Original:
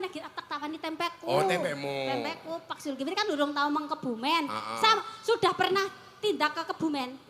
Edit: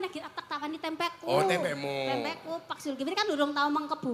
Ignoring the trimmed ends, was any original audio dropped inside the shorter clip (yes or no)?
no